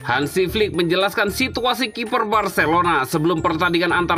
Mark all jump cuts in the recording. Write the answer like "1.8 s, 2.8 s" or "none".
none

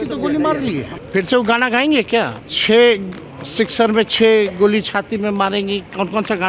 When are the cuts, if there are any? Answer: 0.9 s, 2.5 s

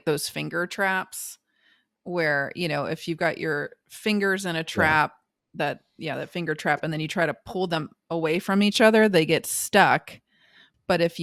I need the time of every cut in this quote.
none

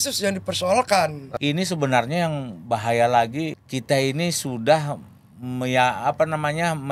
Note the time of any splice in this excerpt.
1.2 s, 3.6 s

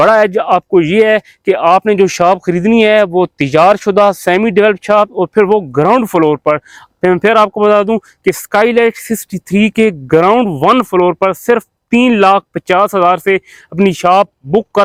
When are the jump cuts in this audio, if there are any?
none

